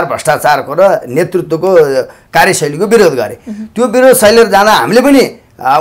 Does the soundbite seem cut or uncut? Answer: uncut